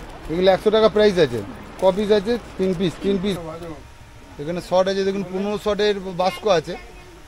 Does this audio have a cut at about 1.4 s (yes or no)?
no